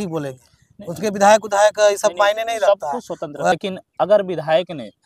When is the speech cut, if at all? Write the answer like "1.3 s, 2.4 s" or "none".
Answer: 3.5 s